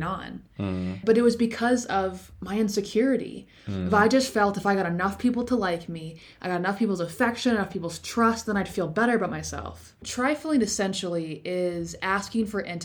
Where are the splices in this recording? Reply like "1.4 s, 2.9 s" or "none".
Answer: 1.0 s, 10.1 s